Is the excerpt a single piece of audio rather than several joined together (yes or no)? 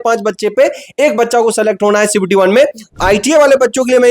no